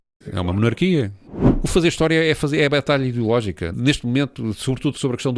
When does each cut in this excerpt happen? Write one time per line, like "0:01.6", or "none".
0:01.3